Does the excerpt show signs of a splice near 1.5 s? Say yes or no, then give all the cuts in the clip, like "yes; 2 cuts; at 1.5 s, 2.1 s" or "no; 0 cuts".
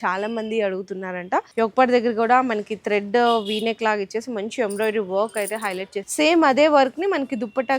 yes; 2 cuts; at 1.5 s, 6.0 s